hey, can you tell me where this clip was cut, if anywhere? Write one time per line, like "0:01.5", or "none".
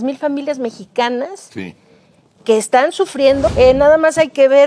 0:03.5